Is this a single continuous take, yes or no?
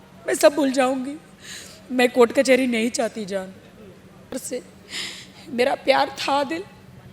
no